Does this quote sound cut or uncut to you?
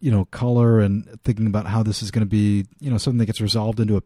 uncut